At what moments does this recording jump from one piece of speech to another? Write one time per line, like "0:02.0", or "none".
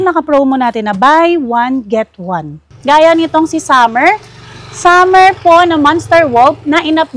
0:02.7